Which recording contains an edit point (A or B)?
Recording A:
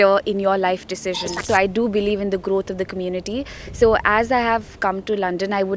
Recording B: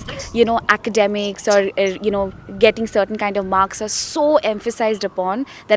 A